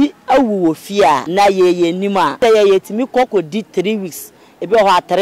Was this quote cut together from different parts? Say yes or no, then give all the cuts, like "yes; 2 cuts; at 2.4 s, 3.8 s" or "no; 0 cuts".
yes; 2 cuts; at 1.3 s, 2.4 s